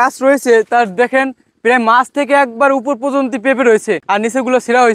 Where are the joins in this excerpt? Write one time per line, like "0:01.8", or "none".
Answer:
0:04.0